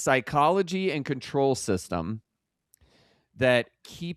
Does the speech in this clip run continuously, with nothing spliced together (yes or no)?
yes